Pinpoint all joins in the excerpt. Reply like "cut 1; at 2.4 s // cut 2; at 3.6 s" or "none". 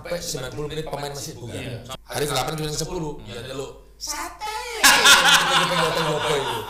cut 1; at 1.9 s